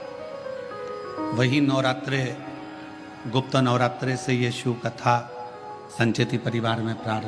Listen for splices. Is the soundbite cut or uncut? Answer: uncut